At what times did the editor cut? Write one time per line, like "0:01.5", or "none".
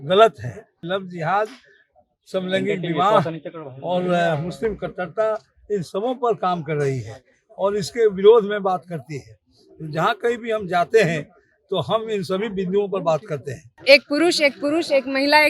0:00.8
0:13.8